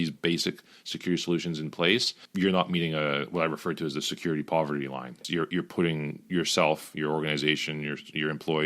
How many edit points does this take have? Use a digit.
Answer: 2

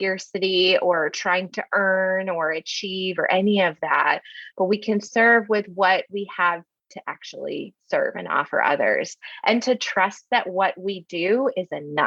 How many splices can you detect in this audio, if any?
0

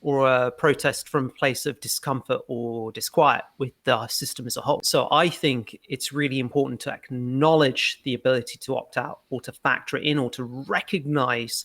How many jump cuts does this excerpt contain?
1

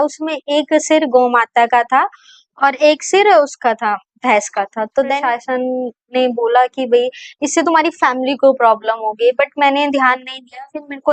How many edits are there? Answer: 1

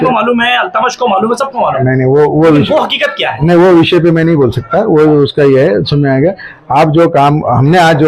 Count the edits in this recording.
0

